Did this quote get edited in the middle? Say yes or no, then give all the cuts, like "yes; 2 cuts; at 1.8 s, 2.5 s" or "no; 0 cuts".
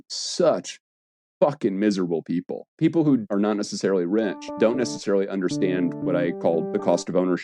yes; 4 cuts; at 2.6 s, 3.2 s, 4.5 s, 6.4 s